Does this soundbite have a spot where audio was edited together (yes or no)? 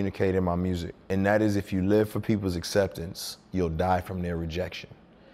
yes